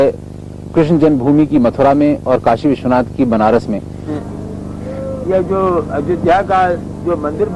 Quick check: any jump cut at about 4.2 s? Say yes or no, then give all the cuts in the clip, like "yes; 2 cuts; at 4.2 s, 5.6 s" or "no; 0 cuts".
yes; 1 cut; at 4.2 s